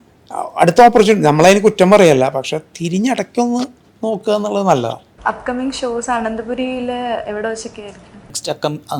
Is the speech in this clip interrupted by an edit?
no; 0 cuts

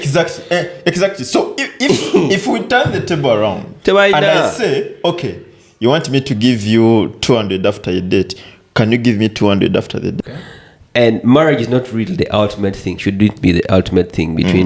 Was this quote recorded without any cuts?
no; 1 cut; at 10.1 s

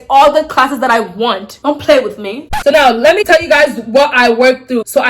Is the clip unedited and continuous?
no; 1 cut; at 2.5 s

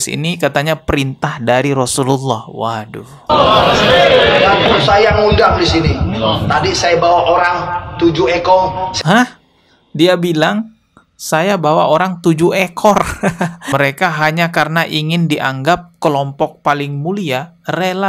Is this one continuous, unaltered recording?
no; 1 cut; at 13.6 s

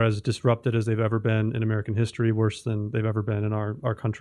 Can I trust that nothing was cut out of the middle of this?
yes; 0 cuts

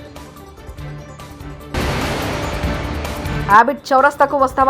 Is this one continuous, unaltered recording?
no; 2 cuts; at 1.7 s, 3.4 s

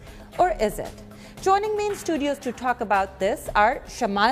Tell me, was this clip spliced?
yes; 1 cut; at 2.1 s

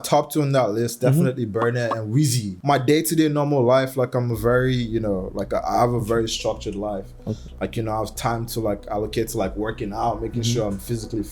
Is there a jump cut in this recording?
yes; 1 cut; at 2.5 s

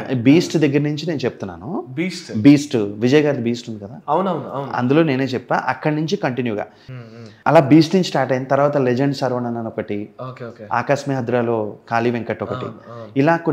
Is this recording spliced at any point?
yes; 1 cut; at 6.8 s

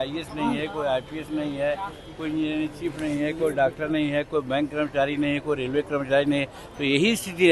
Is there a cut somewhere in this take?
no; 0 cuts

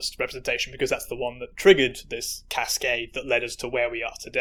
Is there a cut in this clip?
no; 0 cuts

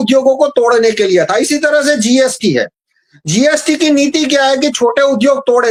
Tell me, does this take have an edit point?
no; 0 cuts

